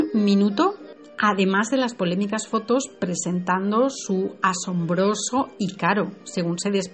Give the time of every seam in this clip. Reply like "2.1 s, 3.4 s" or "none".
none